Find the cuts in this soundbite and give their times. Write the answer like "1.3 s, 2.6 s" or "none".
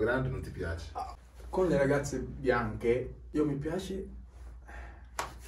1.2 s, 3.2 s